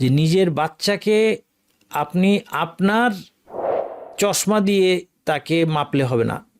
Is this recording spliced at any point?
no; 0 cuts

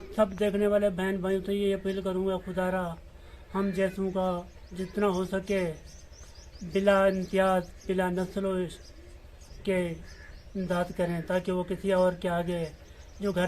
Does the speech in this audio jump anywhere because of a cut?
no; 0 cuts

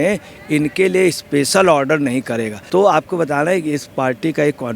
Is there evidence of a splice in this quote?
yes; 1 cut; at 2.5 s

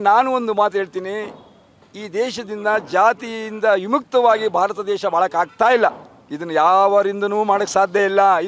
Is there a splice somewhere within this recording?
no; 0 cuts

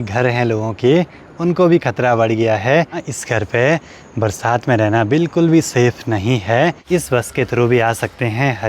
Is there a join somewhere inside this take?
yes; 2 cuts; at 3.1 s, 6.8 s

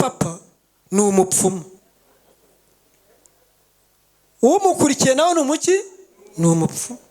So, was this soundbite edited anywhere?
no; 0 cuts

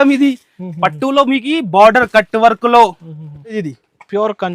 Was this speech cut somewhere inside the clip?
yes; 1 cut; at 3.6 s

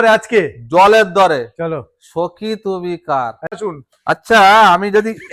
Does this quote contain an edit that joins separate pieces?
yes; 1 cut; at 3.6 s

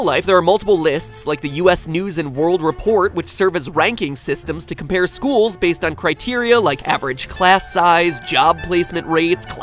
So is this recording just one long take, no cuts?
yes; 0 cuts

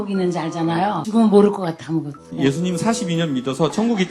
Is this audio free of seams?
no; 2 cuts; at 1.0 s, 2.3 s

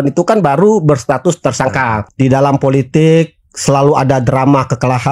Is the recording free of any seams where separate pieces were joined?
no; 1 cut; at 2.0 s

